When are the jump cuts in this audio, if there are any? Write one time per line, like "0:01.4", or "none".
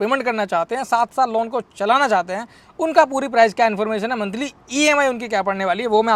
none

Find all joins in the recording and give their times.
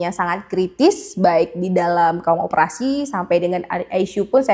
none

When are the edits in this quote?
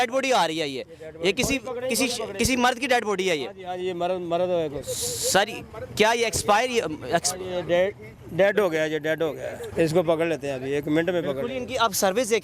0:09.7

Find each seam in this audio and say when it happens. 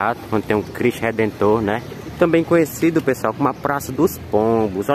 0:02.1

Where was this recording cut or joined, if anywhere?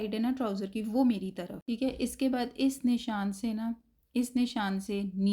0:01.5

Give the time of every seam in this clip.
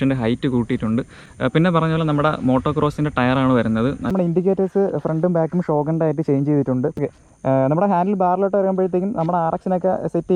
0:04.1
0:07.0

